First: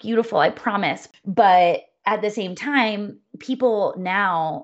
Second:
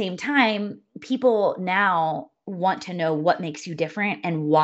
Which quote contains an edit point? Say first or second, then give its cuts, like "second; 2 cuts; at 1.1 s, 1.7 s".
first; 1 cut; at 1.0 s